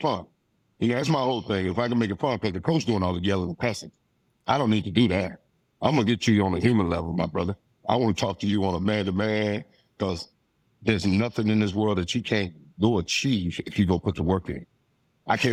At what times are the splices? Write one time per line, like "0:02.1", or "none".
none